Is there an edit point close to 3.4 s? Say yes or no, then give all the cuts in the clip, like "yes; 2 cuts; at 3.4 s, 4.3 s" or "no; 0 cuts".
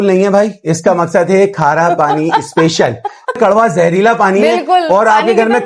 yes; 1 cut; at 3.4 s